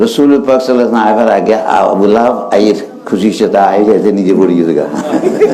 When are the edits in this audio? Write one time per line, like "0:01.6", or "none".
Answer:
none